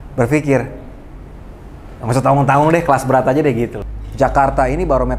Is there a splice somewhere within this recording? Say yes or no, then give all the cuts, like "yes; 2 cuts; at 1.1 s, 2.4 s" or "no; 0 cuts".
yes; 1 cut; at 3.8 s